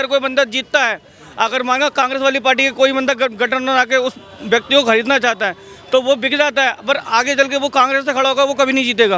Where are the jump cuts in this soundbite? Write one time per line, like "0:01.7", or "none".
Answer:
none